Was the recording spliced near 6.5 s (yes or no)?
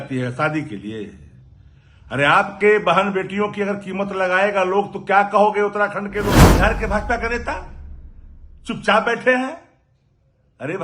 yes